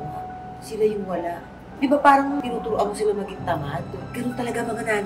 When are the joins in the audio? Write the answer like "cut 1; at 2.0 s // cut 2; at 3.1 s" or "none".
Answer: cut 1; at 1.7 s // cut 2; at 2.4 s // cut 3; at 4.0 s